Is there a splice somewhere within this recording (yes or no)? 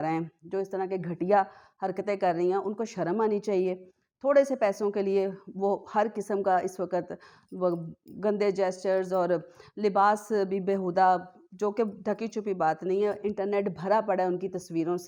no